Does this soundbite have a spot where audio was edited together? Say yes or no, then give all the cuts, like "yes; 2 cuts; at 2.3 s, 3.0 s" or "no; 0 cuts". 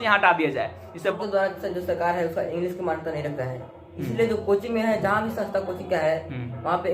yes; 1 cut; at 1.1 s